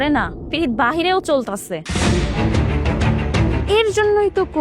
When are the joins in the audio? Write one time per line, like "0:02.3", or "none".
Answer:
0:01.8
0:03.6